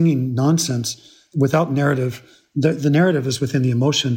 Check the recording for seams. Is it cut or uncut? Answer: uncut